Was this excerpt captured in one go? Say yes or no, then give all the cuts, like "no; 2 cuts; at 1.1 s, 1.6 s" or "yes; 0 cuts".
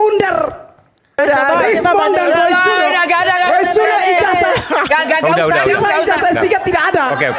no; 1 cut; at 1.2 s